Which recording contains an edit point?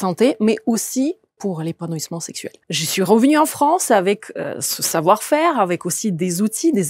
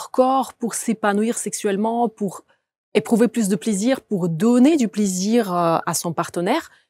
first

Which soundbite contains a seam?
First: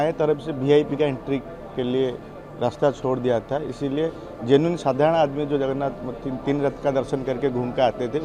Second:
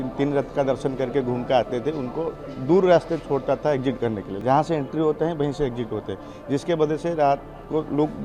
second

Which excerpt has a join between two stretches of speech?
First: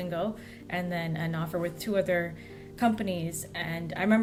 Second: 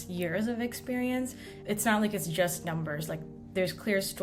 second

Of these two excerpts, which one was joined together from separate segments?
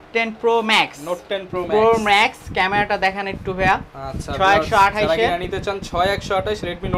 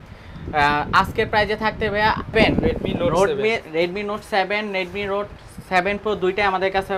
second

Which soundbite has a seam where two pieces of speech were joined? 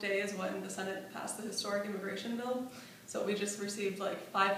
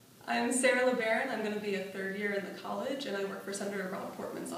first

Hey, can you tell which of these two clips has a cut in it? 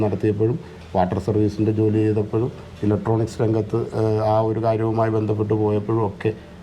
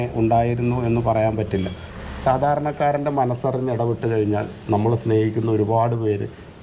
second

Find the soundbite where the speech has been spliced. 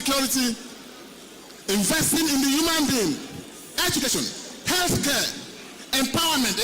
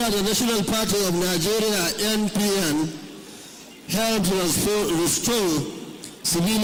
first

